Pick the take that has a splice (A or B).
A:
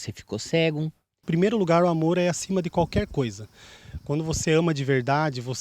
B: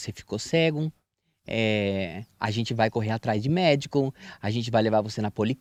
A